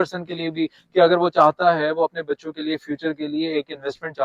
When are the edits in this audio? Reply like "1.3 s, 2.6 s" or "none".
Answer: none